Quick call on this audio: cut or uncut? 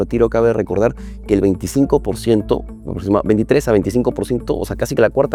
uncut